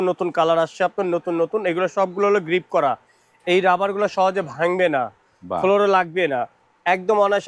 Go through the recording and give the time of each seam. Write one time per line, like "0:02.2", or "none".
none